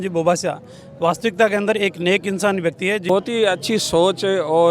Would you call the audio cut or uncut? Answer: cut